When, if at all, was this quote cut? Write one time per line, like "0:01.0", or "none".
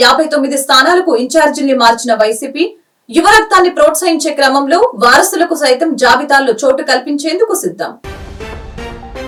none